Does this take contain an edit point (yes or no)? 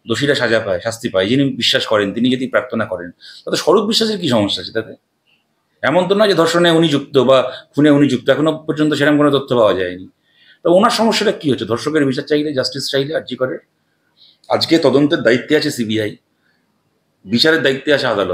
no